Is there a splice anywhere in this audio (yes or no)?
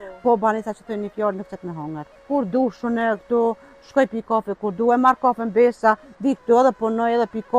yes